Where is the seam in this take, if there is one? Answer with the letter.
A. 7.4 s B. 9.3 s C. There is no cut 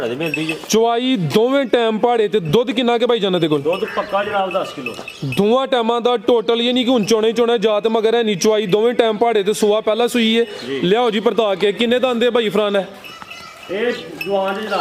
C